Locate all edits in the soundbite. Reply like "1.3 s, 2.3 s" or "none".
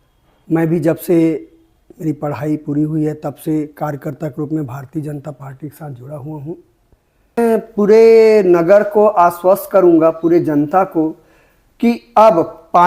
7.4 s